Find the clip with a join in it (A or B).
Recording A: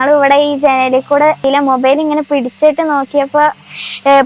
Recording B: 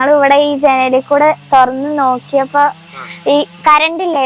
A